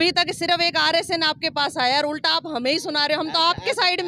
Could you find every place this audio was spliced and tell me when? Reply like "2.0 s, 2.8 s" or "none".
none